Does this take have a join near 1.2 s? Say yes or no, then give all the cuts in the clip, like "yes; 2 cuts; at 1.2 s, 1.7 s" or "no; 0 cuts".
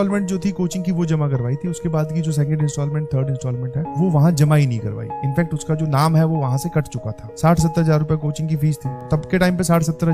no; 2 cuts; at 7.2 s, 9.0 s